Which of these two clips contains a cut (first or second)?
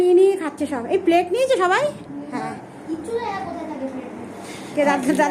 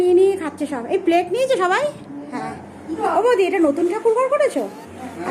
second